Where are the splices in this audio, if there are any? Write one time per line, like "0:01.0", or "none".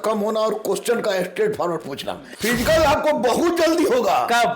0:02.3